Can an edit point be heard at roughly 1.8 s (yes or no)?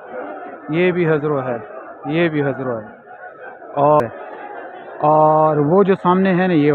no